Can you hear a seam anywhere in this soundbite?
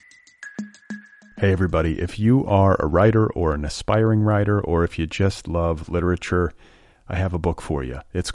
yes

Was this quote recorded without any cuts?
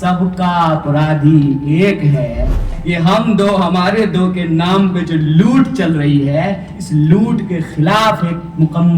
no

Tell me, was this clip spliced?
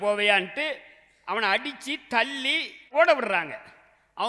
yes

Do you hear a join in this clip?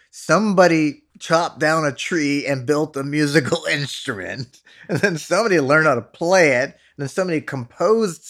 yes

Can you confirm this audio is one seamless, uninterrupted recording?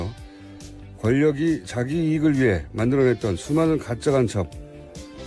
yes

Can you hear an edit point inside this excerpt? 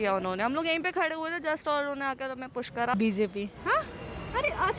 yes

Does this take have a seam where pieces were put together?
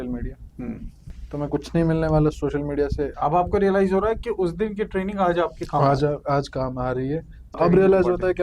yes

